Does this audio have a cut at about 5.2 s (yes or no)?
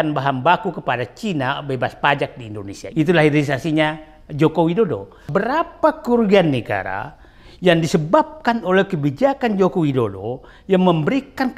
yes